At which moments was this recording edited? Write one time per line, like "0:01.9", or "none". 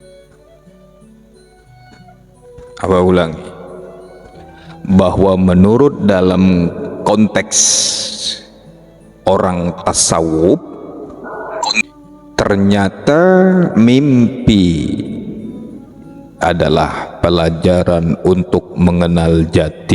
0:11.8